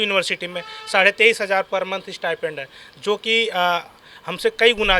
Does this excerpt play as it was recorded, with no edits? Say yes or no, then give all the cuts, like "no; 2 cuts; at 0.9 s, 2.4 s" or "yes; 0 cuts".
yes; 0 cuts